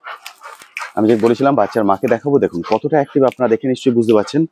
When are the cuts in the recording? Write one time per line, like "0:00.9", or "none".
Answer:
none